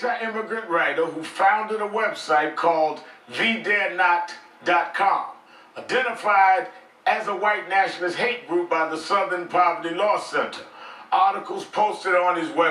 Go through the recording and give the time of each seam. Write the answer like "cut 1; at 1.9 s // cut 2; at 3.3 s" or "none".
cut 1; at 4.4 s